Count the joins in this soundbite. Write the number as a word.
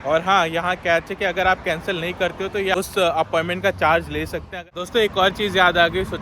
two